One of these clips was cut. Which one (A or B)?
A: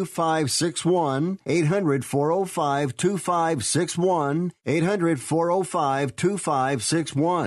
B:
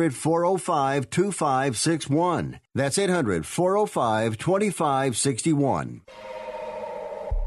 B